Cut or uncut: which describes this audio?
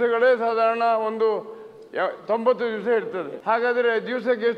cut